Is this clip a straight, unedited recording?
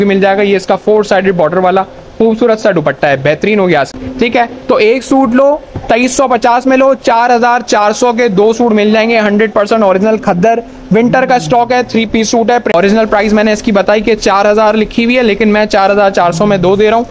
no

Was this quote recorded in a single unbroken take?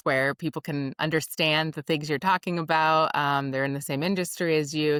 yes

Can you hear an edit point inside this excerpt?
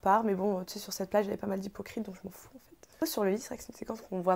yes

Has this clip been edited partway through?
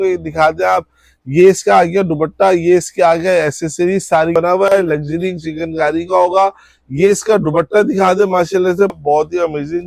yes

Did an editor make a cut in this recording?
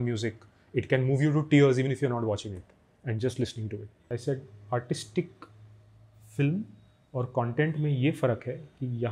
yes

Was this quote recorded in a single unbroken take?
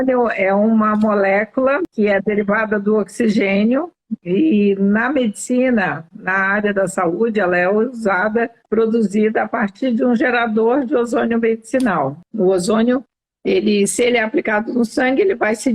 no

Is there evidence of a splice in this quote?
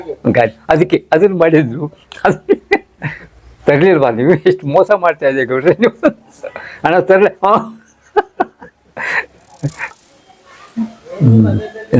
yes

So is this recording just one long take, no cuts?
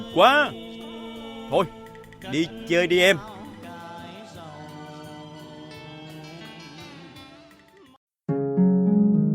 no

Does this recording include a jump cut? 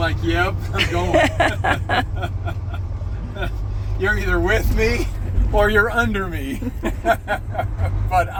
no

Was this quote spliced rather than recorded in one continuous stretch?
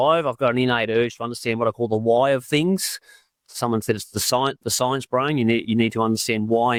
no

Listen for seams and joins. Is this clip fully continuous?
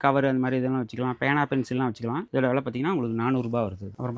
yes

